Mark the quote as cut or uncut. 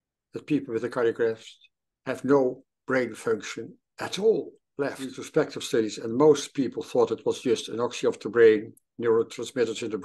cut